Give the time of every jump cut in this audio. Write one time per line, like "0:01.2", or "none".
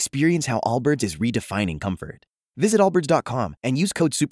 none